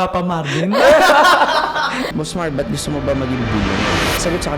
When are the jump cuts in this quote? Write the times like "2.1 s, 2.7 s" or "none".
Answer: 2.1 s